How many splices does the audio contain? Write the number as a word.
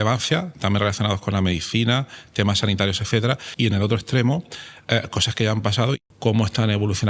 two